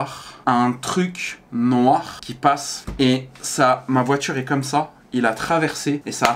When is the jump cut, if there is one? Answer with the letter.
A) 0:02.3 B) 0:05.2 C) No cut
C